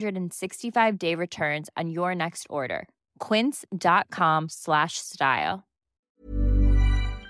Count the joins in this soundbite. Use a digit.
1